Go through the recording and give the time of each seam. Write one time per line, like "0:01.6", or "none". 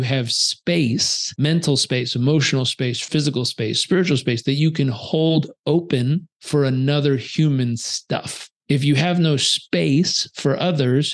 0:01.2
0:03.0
0:06.3